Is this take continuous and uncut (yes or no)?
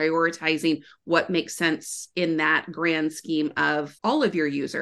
no